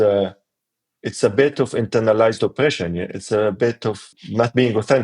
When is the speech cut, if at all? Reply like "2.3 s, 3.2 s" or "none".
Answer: 4.0 s